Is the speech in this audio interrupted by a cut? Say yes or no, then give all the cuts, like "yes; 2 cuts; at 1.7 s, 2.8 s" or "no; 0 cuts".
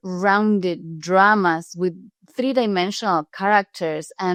no; 0 cuts